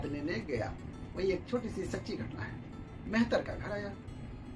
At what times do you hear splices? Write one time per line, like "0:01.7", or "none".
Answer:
0:02.9